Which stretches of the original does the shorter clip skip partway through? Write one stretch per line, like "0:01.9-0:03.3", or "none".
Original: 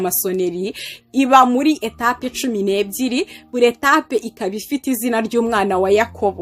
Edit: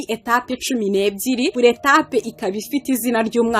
0:03.3-0:03.5